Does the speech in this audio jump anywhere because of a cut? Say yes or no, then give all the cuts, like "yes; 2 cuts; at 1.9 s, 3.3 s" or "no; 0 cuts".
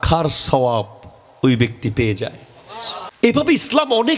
yes; 1 cut; at 3.3 s